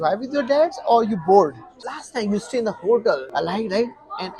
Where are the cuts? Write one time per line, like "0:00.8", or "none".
0:01.9
0:03.3